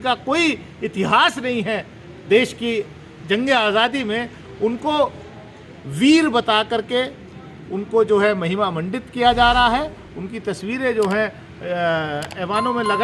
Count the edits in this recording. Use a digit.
0